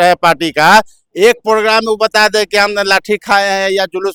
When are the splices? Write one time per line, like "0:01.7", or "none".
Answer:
none